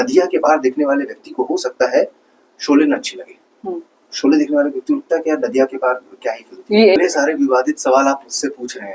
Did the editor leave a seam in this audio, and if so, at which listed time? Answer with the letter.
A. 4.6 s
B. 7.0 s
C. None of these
B